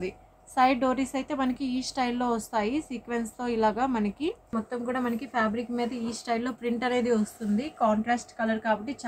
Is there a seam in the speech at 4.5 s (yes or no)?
yes